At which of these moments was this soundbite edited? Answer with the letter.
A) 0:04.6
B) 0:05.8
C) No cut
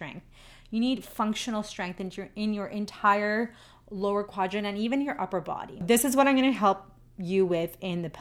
B